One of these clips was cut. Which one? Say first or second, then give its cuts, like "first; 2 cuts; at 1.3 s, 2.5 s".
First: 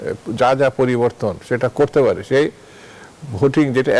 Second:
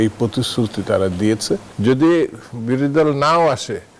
second; 1 cut; at 1.7 s